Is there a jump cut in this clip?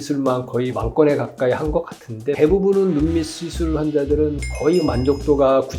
no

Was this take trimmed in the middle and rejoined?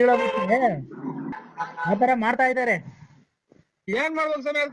yes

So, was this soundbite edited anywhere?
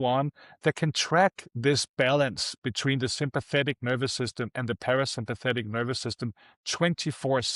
no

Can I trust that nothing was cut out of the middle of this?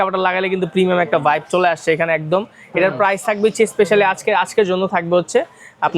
yes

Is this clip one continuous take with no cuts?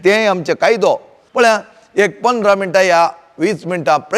no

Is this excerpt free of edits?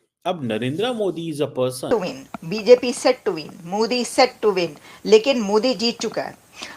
no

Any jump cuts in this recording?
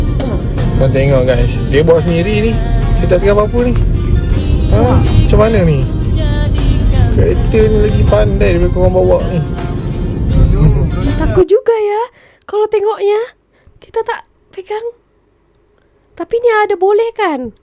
no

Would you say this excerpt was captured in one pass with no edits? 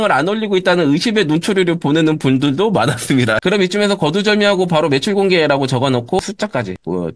no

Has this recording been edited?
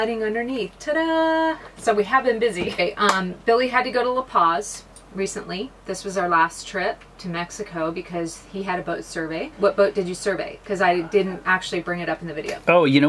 yes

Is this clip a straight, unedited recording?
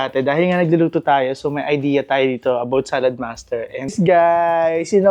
no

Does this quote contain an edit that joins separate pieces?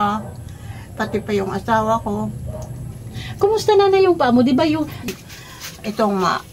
no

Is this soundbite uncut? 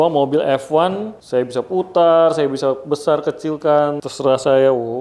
no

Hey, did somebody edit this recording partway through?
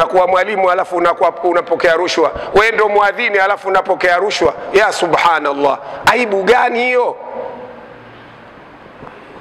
no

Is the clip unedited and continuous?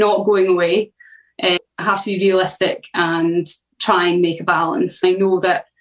no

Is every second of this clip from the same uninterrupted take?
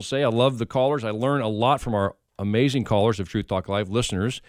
yes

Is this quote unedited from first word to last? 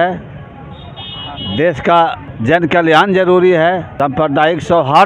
no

